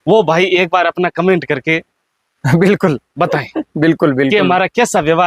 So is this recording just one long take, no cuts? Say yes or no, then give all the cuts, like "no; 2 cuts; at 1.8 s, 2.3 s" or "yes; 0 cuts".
yes; 0 cuts